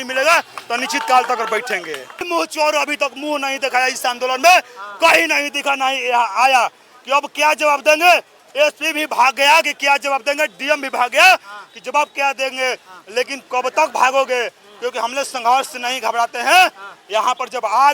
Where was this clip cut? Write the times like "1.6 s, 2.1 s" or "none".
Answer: 2.3 s